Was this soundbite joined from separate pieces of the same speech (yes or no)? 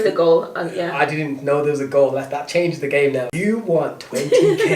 yes